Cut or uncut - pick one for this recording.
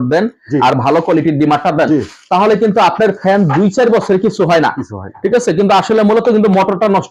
uncut